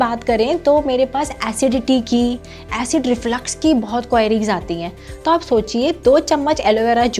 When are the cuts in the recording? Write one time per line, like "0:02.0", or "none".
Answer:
none